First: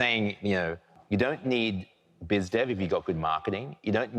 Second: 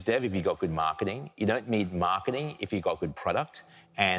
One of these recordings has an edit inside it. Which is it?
first; 1 cut; at 0.9 s

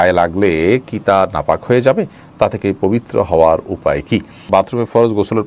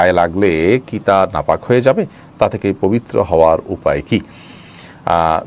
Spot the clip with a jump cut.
first; 1 cut; at 4.4 s

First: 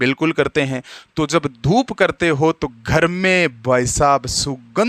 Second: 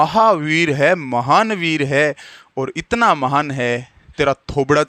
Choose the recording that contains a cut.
second; 1 cut; at 4.0 s

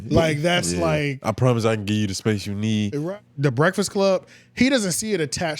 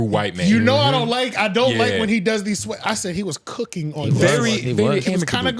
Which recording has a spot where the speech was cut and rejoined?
first; 1 cut; at 3.0 s

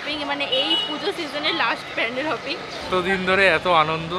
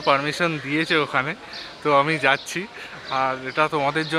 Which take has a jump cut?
first; 1 cut; at 2.9 s

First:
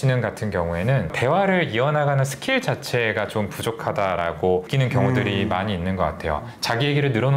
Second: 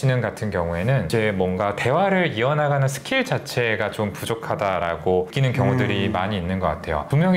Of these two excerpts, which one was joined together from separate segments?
first; 2 cuts; at 1.1 s, 6.4 s

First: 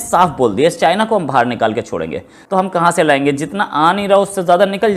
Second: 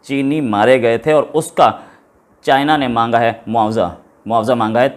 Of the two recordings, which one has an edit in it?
first; 1 cut; at 2.3 s

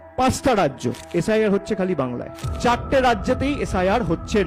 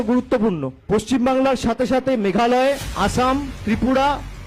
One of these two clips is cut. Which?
first; 1 cut; at 2.4 s

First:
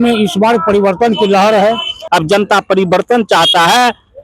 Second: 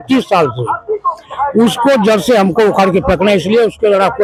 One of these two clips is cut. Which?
first; 1 cut; at 1.9 s

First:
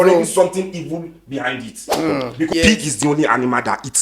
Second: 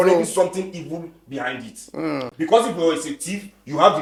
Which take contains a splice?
first; 1 cut; at 2.5 s

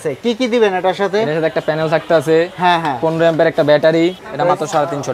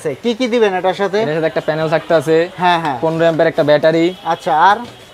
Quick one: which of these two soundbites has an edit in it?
first; 1 cut; at 4.2 s

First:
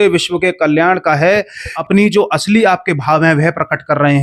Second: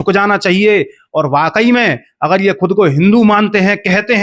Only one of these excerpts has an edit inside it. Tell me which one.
first; 1 cut; at 1.7 s

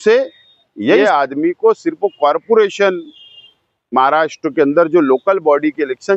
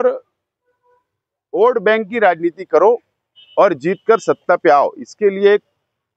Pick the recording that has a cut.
first; 1 cut; at 1.0 s

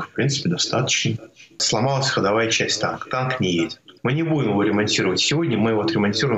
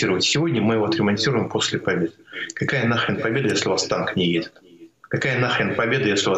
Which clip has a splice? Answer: first; 2 cuts; at 1.6 s, 3.9 s

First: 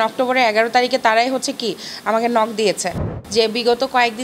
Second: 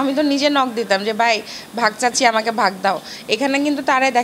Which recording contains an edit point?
first; 1 cut; at 3.1 s

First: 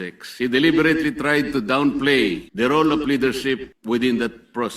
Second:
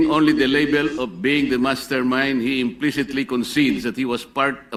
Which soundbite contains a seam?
first; 2 cuts; at 2.4 s, 3.7 s

